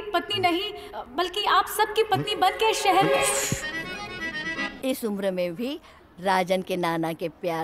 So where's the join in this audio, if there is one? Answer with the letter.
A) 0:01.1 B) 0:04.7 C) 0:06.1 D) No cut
B